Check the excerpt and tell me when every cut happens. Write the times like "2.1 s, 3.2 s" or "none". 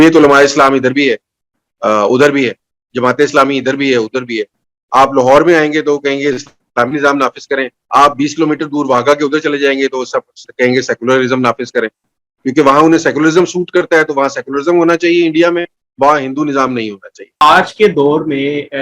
17.4 s